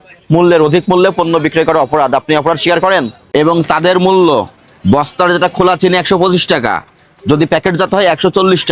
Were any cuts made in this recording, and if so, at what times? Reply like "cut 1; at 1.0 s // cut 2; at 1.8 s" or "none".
cut 1; at 3.2 s